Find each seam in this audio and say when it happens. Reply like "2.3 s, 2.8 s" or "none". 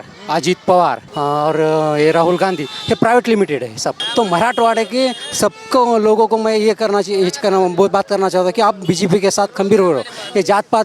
1.1 s, 4.0 s